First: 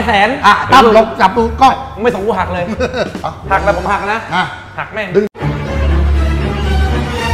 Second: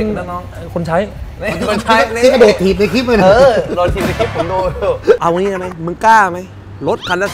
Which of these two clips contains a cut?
second; 1 cut; at 5.2 s

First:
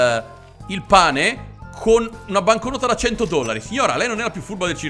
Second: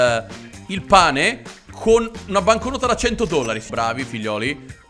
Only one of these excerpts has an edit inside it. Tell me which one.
second; 1 cut; at 3.7 s

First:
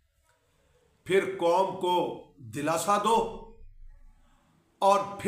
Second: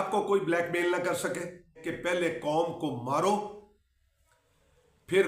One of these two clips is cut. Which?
second; 1 cut; at 1.8 s

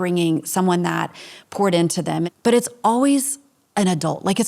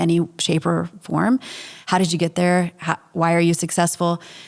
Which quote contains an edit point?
first; 1 cut; at 2.2 s

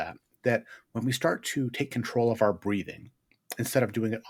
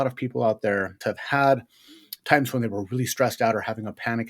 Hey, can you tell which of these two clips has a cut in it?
second; 1 cut; at 1.0 s

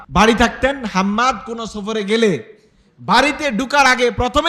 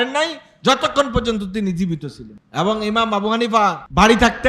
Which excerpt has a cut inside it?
second; 1 cut; at 2.6 s

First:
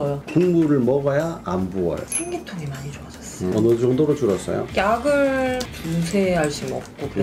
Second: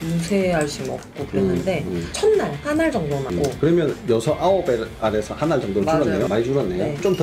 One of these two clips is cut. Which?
first; 1 cut; at 2.1 s

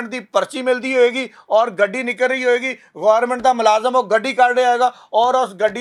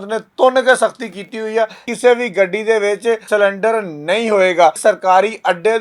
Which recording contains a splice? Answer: second; 3 cuts; at 1.9 s, 3.2 s, 4.8 s

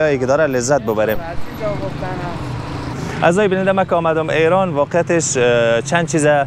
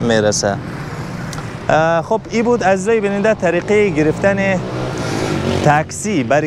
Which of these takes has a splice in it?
first; 1 cut; at 3.0 s

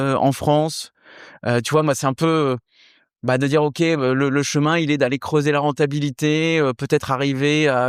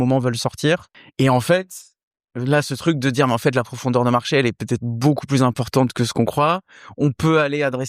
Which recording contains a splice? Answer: second; 1 cut; at 1.0 s

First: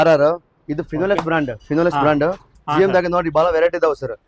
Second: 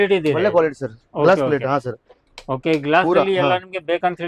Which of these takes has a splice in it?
first; 1 cut; at 2.5 s

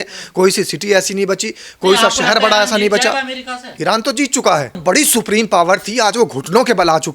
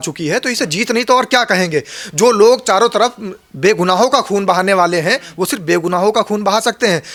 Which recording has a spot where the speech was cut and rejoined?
first; 1 cut; at 4.8 s

